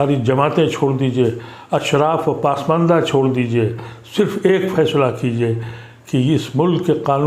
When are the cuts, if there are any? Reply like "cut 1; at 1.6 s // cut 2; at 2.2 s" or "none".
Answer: none